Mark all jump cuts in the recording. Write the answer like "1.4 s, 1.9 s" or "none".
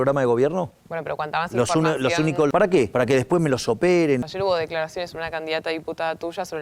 2.7 s, 4.3 s